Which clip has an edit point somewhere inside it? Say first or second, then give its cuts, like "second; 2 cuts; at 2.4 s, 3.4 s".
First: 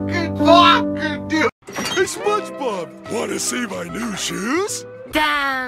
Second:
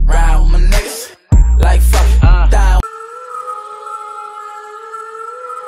second; 1 cut; at 3.8 s